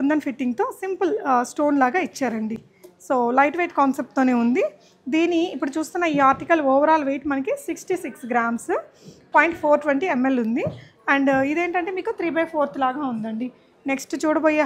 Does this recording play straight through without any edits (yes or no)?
yes